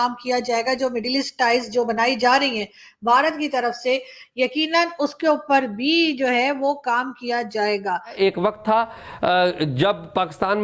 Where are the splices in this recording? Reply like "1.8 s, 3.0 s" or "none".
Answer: 8.1 s